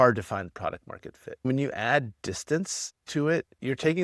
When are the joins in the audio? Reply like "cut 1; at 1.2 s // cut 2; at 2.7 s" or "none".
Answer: cut 1; at 1.5 s